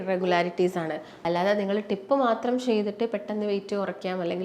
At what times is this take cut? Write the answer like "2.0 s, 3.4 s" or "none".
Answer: 1.1 s